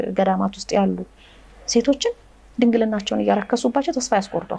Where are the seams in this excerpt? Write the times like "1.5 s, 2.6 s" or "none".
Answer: none